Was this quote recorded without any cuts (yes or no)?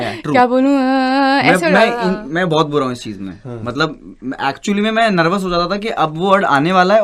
yes